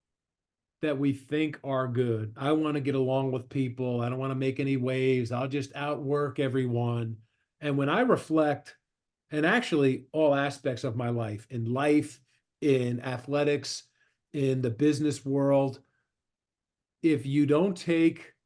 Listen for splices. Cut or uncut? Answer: uncut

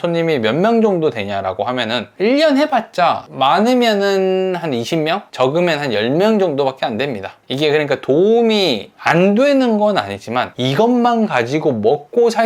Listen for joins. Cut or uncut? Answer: uncut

